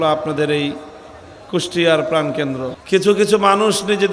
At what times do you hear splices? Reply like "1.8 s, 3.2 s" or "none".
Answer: 2.8 s

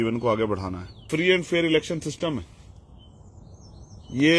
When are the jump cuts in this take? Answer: 1.1 s

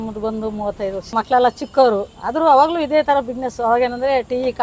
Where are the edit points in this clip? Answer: 1.1 s

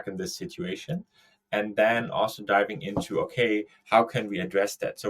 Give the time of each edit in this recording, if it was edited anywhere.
none

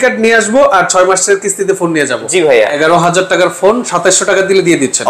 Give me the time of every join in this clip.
2.7 s

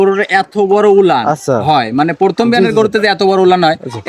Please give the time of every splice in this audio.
none

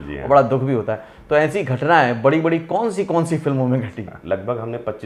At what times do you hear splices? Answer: 4.1 s

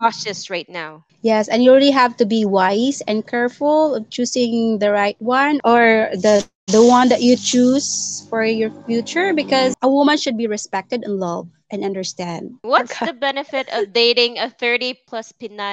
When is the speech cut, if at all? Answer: 9.7 s, 12.6 s

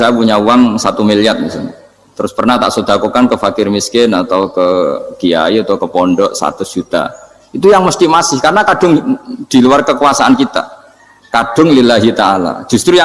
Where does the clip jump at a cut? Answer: none

